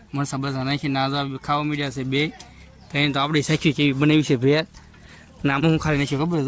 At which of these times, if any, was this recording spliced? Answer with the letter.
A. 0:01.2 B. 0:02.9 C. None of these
C